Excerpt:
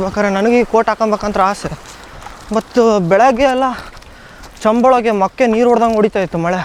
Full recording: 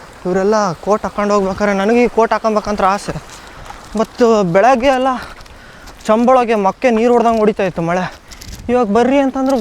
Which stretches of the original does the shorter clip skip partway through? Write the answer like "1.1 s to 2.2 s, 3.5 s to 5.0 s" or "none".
none